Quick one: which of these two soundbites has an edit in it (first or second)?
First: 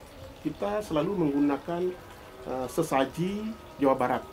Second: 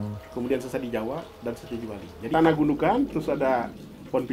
second